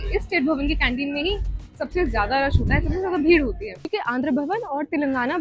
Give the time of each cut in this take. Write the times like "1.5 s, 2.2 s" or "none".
3.9 s